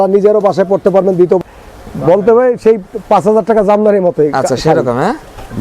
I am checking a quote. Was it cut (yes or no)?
yes